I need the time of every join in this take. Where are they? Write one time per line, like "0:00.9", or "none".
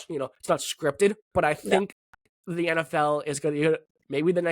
0:01.2